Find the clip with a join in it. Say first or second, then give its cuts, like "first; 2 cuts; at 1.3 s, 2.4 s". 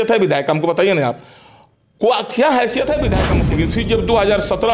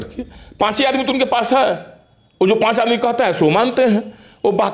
first; 1 cut; at 3.3 s